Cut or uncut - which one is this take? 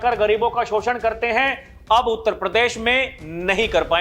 uncut